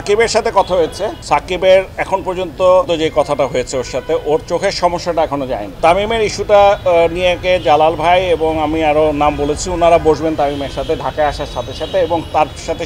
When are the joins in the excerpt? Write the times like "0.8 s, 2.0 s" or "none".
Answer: 1.2 s, 2.9 s, 5.7 s, 7.4 s